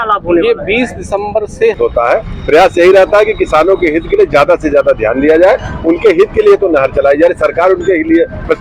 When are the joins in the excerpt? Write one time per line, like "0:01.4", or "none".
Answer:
0:01.8